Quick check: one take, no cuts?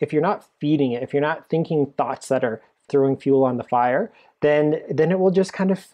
no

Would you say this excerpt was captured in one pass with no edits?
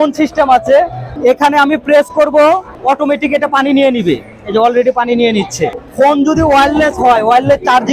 no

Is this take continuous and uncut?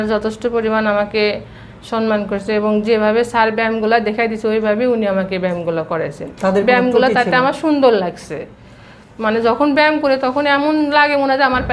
yes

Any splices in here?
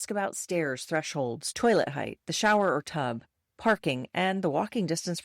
yes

